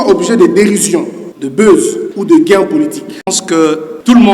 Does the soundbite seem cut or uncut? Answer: cut